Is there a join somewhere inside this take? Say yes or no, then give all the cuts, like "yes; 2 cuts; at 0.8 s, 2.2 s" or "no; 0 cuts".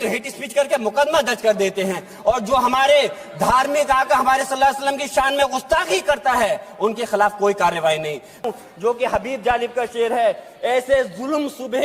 yes; 1 cut; at 8.5 s